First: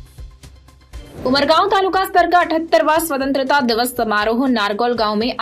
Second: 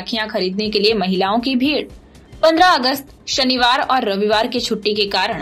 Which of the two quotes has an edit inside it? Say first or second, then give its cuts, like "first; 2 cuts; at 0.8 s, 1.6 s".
first; 1 cut; at 1.1 s